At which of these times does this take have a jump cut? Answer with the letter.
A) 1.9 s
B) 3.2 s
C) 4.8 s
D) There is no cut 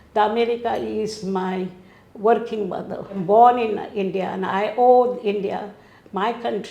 B